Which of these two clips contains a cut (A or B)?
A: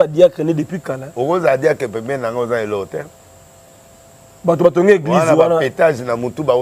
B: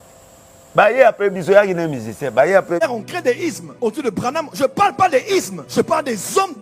B